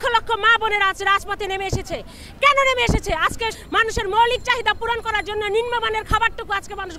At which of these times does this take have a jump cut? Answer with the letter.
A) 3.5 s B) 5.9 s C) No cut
A